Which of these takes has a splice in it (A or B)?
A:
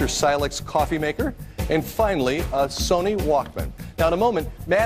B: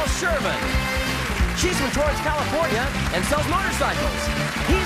A